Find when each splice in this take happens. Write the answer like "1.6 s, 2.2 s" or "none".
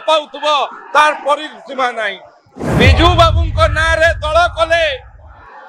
2.6 s